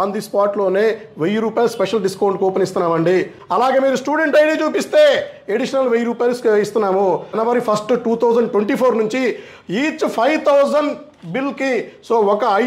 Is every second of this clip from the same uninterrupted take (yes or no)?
no